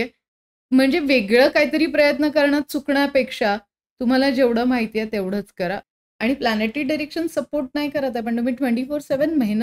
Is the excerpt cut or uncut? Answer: cut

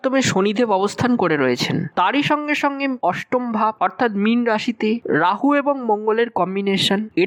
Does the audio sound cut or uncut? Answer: uncut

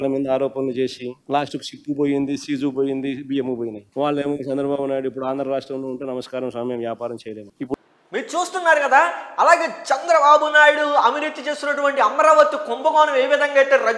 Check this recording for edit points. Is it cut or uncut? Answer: uncut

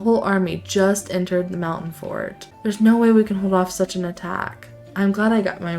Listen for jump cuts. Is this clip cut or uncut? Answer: cut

